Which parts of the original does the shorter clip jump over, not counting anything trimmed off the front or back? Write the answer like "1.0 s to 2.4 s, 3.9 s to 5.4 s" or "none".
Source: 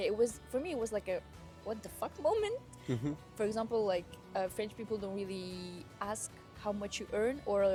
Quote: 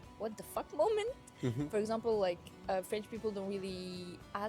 3.1 s to 3.3 s

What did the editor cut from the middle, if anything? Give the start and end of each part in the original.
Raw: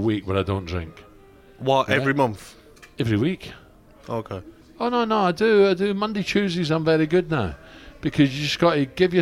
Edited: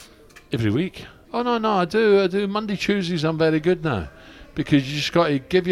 3.6 s to 4.6 s

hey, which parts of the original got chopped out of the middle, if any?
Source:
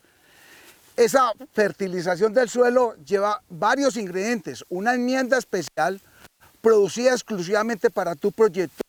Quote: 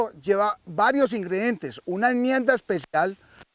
none

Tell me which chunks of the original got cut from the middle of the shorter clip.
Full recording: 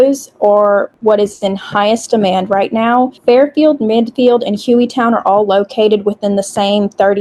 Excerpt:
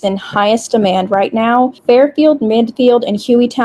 none

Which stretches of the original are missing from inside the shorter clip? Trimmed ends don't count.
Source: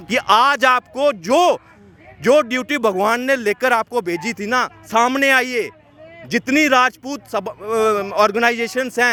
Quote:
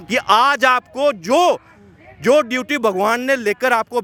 none

